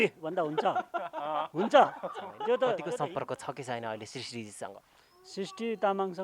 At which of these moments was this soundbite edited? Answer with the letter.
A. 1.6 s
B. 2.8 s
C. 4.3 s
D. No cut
B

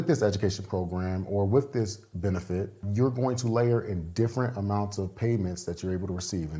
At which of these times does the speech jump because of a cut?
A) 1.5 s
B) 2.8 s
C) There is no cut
B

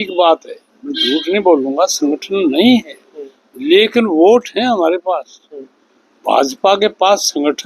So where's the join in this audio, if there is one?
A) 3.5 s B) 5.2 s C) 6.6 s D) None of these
D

